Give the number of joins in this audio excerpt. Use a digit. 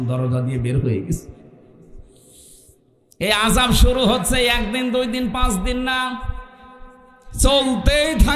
0